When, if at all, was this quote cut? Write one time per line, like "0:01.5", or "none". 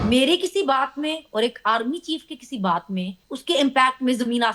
0:03.2